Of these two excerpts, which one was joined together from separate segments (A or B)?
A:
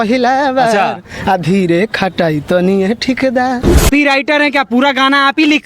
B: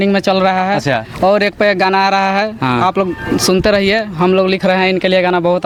A